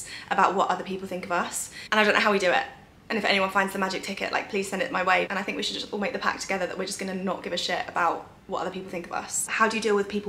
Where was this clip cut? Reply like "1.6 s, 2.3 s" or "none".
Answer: none

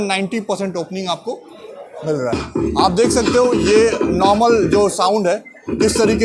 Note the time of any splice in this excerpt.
2.3 s

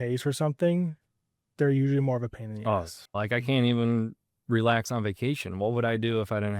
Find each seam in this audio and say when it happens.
3.2 s

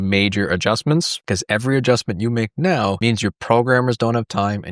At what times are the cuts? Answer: 1.2 s, 3.0 s

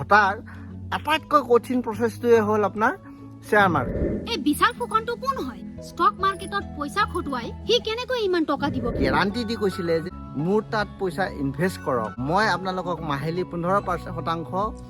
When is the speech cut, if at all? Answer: 4.1 s, 8.9 s, 10.1 s, 12.2 s

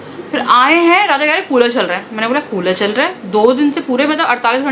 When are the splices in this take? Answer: none

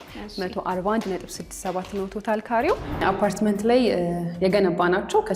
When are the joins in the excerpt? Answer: 3.0 s

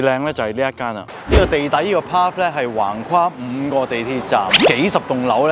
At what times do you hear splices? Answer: 1.3 s

